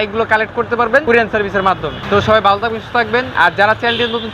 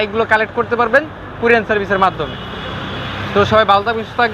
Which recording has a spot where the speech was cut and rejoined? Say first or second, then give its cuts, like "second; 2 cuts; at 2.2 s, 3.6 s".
first; 3 cuts; at 1.0 s, 2.0 s, 3.3 s